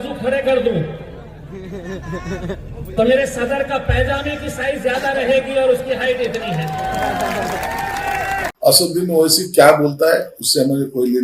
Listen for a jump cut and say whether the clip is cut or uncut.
cut